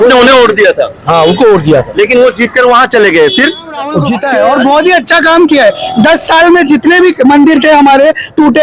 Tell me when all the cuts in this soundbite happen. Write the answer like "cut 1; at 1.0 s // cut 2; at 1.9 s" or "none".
cut 1; at 3.9 s